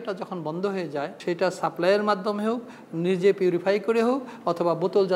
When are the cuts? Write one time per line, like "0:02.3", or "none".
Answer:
0:01.1